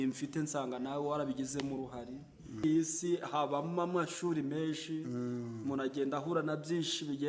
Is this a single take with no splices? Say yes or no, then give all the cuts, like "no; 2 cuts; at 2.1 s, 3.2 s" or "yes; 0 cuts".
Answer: no; 1 cut; at 2.6 s